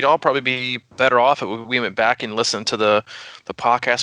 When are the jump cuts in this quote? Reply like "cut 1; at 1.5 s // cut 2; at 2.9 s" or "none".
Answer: cut 1; at 0.9 s